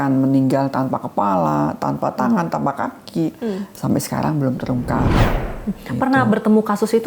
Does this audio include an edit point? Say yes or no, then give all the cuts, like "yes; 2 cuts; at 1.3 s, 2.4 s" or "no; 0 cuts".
yes; 1 cut; at 5.2 s